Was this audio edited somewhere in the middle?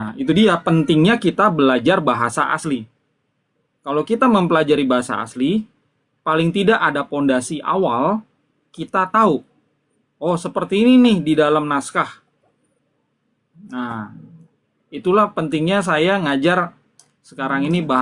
no; 0 cuts

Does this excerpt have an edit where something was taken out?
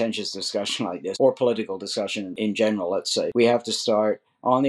yes; 3 cuts; at 1.1 s, 2.3 s, 3.3 s

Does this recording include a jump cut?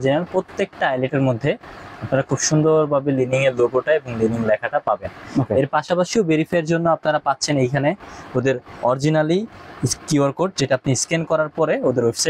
no; 0 cuts

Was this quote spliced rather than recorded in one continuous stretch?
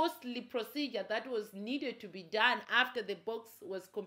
no; 0 cuts

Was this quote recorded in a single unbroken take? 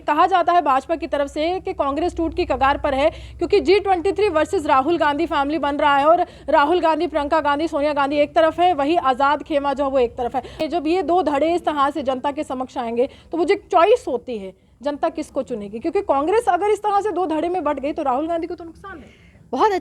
no; 1 cut; at 10.6 s

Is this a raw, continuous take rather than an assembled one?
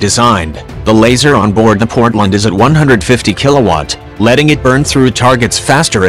no; 1 cut; at 3.5 s

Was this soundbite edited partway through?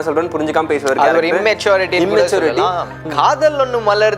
yes; 1 cut; at 3.0 s

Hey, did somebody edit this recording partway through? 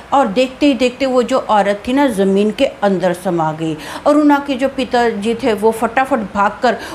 no; 0 cuts

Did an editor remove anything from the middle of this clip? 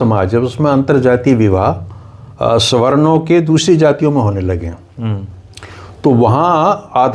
no; 0 cuts

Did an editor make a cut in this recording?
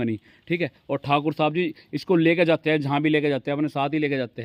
no; 0 cuts

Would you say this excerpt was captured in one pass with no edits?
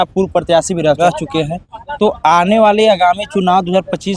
no; 1 cut; at 1.0 s

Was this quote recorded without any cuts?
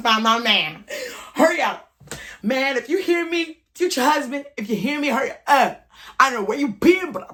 yes; 0 cuts

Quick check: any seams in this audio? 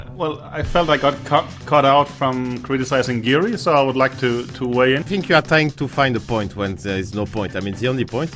yes; 1 cut; at 5.1 s

